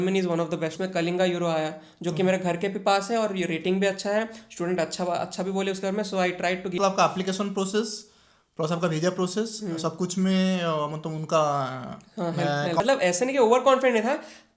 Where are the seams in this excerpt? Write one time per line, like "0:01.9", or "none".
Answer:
0:00.7
0:06.8
0:12.8

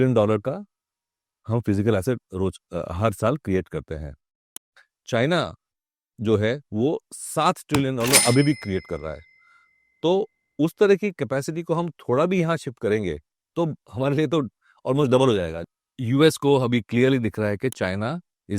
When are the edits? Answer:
0:15.6

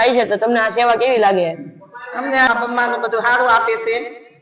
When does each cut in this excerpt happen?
0:02.5

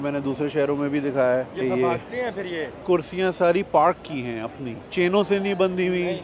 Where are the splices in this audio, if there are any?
0:02.8

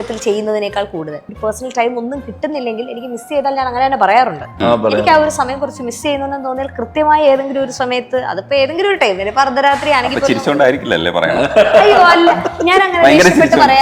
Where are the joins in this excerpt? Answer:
0:01.3

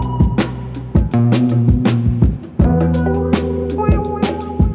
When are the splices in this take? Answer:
none

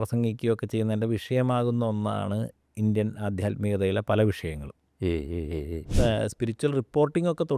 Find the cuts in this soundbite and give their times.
0:05.8

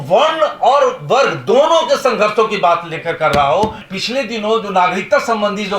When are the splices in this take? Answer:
0:03.9

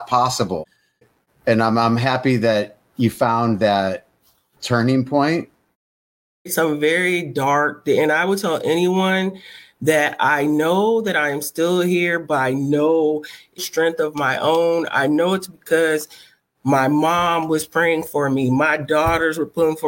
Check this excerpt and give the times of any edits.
0:06.4
0:13.6

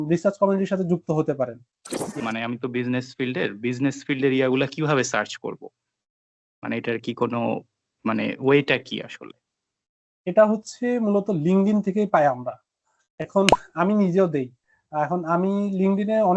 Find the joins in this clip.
0:02.2

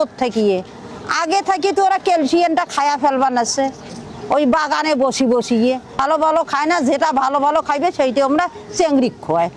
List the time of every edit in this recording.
0:06.0

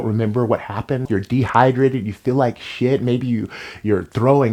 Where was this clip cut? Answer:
0:01.1

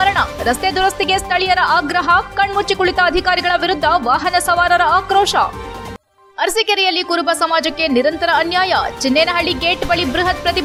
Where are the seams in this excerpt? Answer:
none

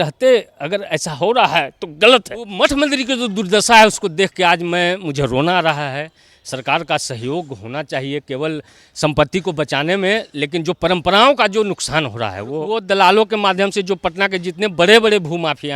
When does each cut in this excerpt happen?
0:02.5
0:12.7

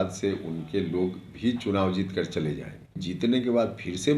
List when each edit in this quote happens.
0:03.0

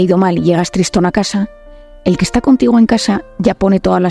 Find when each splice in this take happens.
none

